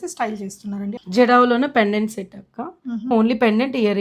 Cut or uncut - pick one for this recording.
cut